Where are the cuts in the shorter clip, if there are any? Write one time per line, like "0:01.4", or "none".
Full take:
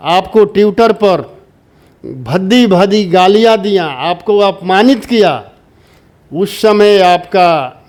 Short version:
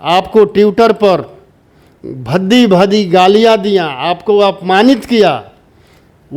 none